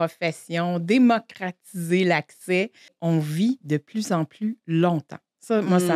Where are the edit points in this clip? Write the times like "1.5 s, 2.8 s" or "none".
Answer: 2.9 s